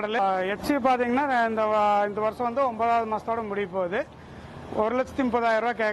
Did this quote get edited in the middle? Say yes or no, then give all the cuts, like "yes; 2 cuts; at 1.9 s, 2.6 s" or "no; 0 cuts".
no; 0 cuts